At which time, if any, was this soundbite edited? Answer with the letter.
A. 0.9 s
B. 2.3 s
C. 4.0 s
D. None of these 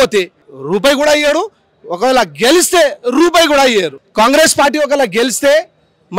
C